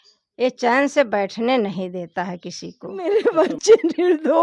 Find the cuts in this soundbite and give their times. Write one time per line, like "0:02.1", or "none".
0:03.0